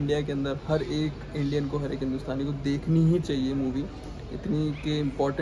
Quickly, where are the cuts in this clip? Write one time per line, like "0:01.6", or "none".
none